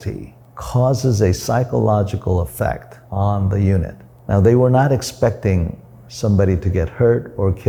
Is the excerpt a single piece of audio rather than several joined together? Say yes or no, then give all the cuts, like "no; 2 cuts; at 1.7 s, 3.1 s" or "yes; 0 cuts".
yes; 0 cuts